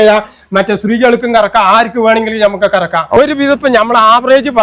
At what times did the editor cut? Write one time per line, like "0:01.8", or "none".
0:03.2

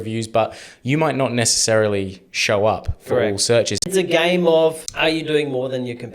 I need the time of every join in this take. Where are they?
0:03.9
0:04.9

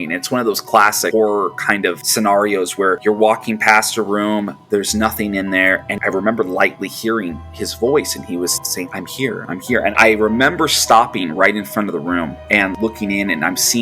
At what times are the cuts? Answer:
0:02.0
0:03.0
0:05.9
0:10.0
0:12.4

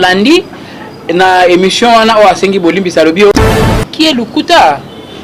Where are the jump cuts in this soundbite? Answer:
0:03.5

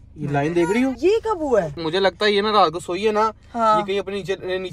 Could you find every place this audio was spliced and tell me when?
0:01.0
0:01.8

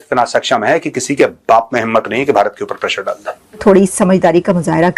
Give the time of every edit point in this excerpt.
0:03.6

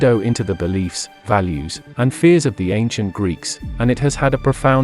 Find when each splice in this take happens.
none

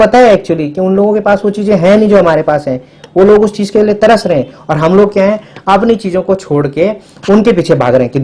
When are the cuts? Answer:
none

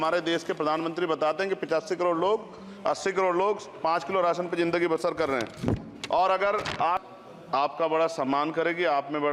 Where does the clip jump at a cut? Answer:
0:07.0

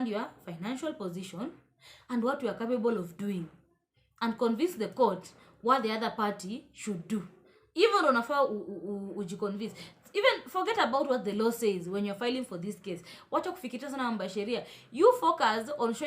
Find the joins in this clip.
none

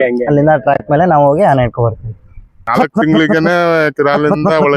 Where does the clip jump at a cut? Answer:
0:02.7

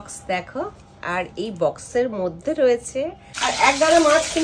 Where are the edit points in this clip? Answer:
0:03.3

